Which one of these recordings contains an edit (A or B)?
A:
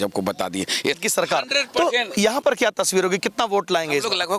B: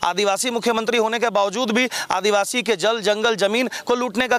A